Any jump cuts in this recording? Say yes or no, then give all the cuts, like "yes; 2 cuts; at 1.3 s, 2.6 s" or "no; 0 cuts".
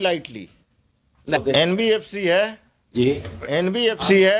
yes; 1 cut; at 1.4 s